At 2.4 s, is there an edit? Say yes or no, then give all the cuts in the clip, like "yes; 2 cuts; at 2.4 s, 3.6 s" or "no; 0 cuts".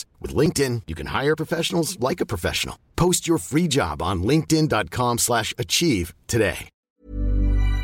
no; 1 cut; at 6.7 s